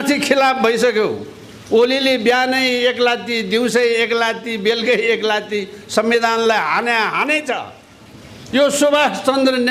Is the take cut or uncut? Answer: uncut